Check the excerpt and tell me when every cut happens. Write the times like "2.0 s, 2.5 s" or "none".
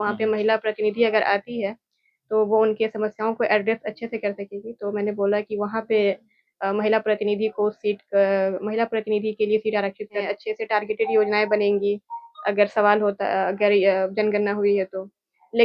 10.2 s